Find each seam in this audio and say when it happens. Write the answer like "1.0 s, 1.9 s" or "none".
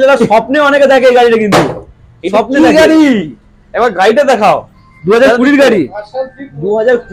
none